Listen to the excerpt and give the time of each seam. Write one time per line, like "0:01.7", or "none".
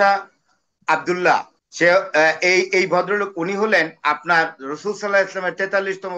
0:01.5